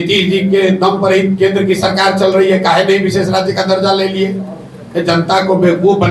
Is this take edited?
no; 0 cuts

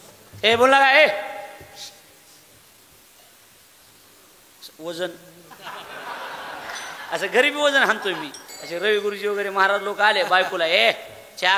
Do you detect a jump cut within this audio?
no; 0 cuts

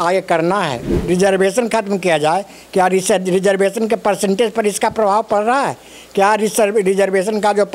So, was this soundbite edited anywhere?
yes; 1 cut; at 0.9 s

